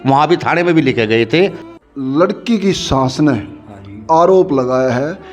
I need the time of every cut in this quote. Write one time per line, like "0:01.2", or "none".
0:01.6